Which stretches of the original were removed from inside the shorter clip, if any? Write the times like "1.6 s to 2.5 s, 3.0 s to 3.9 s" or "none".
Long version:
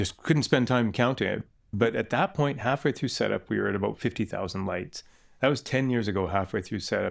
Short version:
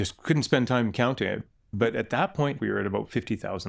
2.6 s to 3.5 s